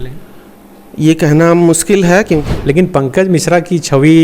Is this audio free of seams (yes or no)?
no